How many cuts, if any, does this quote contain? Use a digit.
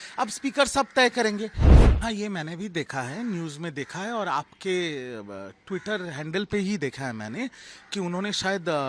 1